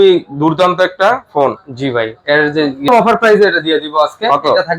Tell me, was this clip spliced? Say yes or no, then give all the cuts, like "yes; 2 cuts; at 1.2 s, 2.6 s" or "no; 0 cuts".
yes; 1 cut; at 2.9 s